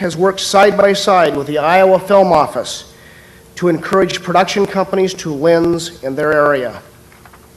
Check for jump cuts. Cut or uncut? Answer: uncut